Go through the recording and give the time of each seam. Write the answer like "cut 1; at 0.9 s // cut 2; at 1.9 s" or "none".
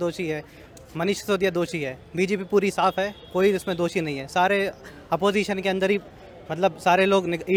none